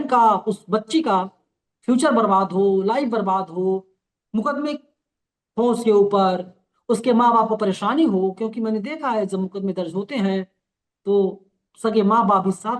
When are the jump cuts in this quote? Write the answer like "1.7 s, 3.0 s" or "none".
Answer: none